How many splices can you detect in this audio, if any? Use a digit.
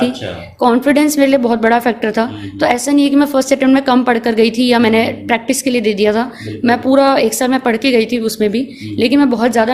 0